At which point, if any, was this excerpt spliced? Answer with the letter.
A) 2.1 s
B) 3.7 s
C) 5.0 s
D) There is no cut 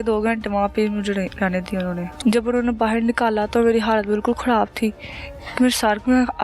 A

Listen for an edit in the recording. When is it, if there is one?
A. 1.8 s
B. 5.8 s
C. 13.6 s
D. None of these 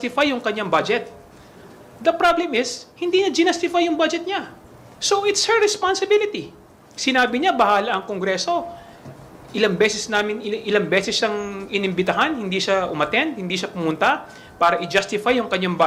D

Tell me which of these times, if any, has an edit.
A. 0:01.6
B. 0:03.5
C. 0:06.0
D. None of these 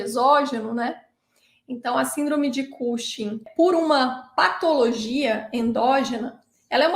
B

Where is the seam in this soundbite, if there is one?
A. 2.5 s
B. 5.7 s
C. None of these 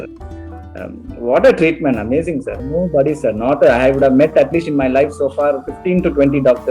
A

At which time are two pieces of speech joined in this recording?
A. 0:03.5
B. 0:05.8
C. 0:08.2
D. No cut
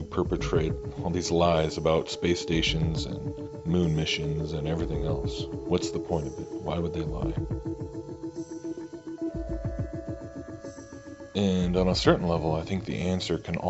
A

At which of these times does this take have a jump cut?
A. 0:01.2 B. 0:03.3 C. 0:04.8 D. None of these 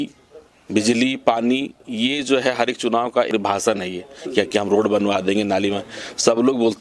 B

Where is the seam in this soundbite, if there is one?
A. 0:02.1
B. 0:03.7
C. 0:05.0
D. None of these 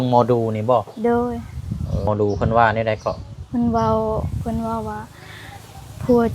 A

